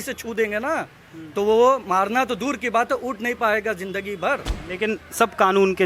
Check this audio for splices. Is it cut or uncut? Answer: cut